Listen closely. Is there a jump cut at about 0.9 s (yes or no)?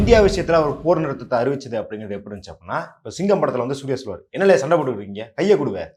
no